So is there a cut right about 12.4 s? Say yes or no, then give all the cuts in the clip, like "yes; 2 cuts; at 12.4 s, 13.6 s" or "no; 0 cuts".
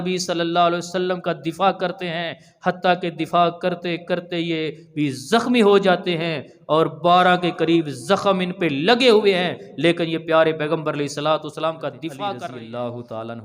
yes; 1 cut; at 12.4 s